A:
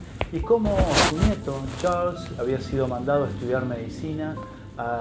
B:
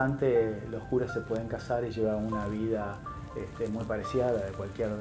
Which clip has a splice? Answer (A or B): B